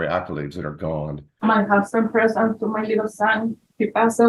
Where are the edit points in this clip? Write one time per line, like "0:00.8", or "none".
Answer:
0:01.2